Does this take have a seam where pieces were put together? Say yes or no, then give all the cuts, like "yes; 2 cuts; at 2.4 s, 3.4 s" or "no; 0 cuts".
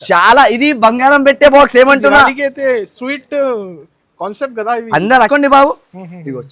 yes; 1 cut; at 5.3 s